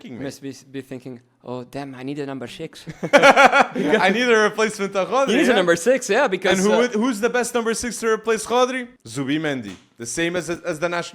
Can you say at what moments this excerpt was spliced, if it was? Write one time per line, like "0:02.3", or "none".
none